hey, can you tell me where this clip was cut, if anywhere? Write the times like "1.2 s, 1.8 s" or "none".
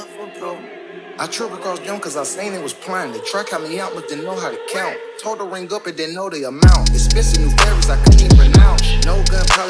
none